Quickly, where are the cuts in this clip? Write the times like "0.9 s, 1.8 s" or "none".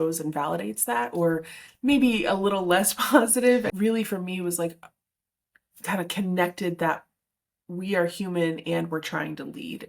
3.7 s